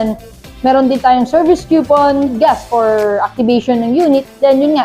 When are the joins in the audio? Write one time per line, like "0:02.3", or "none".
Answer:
0:02.3

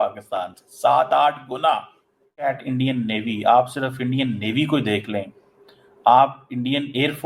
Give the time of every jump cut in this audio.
0:02.5

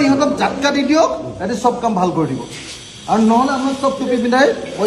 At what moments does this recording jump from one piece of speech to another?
none

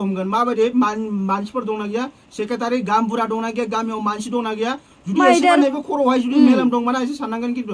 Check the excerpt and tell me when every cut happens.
none

